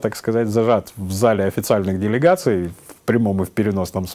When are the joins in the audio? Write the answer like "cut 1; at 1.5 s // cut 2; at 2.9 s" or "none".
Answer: none